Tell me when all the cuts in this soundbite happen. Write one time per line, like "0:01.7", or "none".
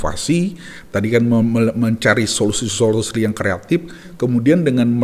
none